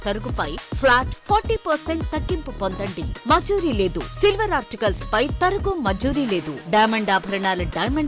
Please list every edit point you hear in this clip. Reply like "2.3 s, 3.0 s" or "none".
none